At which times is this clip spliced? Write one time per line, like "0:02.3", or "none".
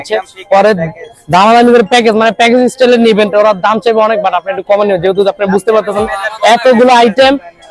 none

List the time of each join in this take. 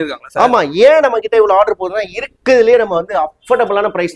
none

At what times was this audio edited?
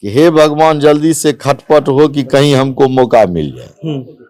none

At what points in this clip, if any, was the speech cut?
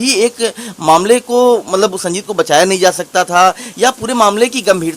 none

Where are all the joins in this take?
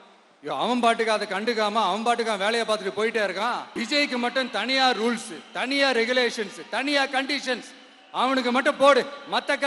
0:03.7

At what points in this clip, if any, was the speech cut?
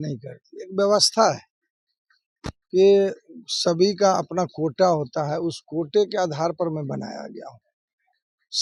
none

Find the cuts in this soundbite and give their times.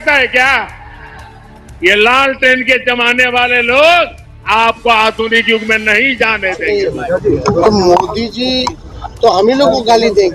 0:06.6

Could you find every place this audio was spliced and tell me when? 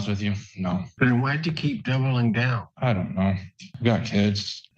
0:02.6
0:03.7

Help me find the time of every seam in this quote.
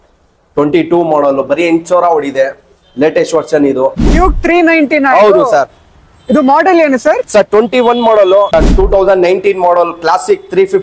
0:04.1
0:08.5

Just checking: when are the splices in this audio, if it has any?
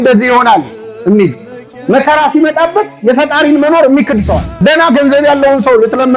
0:04.5

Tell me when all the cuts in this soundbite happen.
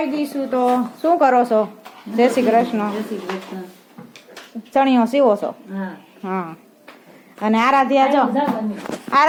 none

